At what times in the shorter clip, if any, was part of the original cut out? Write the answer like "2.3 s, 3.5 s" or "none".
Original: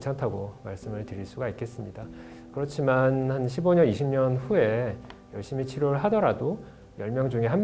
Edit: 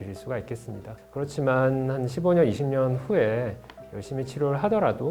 0.9 s